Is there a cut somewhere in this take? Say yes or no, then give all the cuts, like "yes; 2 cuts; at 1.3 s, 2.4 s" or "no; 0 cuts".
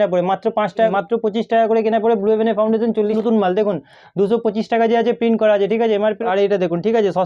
yes; 3 cuts; at 0.9 s, 3.2 s, 6.2 s